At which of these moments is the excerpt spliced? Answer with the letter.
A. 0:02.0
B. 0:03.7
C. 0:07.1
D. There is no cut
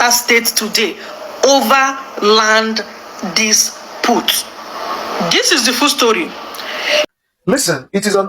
C